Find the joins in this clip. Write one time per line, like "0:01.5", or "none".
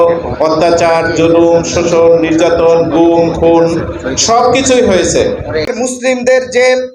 0:05.7